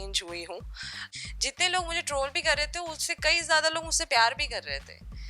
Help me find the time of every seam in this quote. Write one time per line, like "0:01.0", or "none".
0:00.9